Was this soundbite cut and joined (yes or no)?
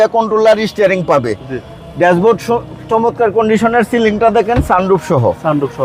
no